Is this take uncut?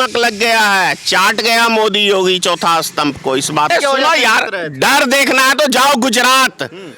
no; 1 cut; at 3.7 s

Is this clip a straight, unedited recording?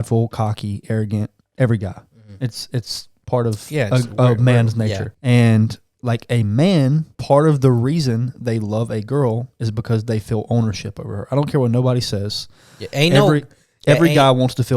no; 2 cuts; at 5.1 s, 7.1 s

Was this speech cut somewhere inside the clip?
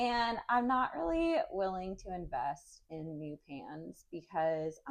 no; 0 cuts

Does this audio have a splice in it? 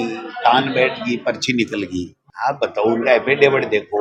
no; 0 cuts

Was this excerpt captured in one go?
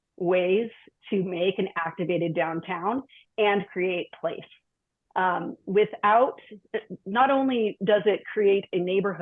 yes; 0 cuts

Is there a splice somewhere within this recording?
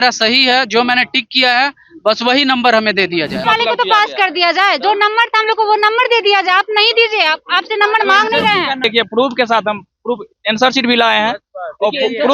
yes; 2 cuts; at 3.4 s, 8.8 s

